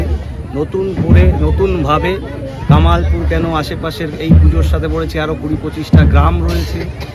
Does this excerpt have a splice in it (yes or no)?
no